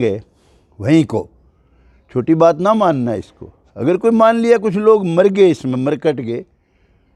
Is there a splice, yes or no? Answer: no